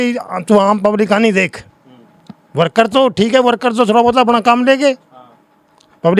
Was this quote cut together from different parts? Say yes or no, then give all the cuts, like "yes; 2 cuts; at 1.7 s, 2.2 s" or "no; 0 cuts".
no; 0 cuts